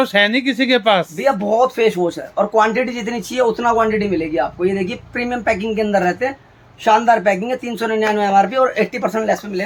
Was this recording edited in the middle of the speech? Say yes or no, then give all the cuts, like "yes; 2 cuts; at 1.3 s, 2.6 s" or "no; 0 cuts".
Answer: no; 0 cuts